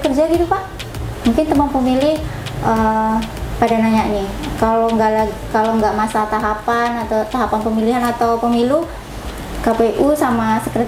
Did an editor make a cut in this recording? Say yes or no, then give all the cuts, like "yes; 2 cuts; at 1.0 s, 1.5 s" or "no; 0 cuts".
no; 0 cuts